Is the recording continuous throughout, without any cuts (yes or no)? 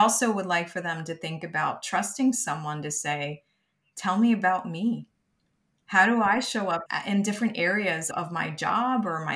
no